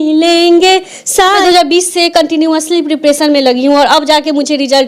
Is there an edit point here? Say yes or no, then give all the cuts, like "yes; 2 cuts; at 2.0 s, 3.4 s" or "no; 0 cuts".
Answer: yes; 1 cut; at 1.4 s